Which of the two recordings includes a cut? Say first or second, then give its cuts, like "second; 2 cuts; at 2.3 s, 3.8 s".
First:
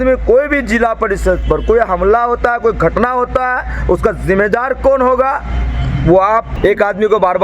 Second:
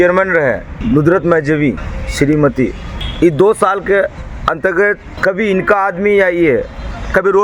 first; 1 cut; at 6.5 s